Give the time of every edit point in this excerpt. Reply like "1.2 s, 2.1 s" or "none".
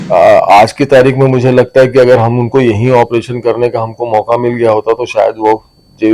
none